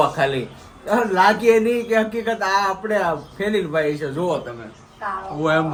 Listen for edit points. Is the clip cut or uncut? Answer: uncut